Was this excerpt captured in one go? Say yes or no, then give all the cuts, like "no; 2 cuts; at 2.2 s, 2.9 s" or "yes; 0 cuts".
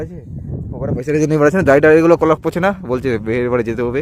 yes; 0 cuts